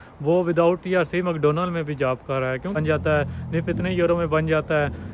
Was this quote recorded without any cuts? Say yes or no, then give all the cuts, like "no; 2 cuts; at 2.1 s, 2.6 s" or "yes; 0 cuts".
no; 1 cut; at 2.8 s